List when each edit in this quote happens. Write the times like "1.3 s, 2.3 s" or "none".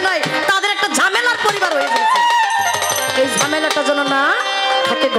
none